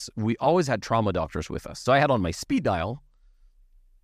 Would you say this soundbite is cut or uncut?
cut